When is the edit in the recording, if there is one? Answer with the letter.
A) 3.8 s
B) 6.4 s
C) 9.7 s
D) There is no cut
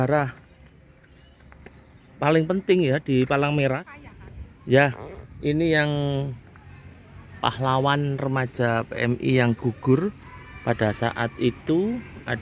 A